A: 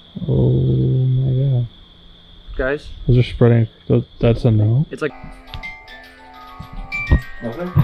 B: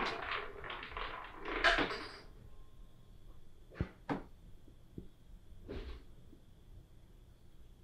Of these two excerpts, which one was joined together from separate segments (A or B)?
A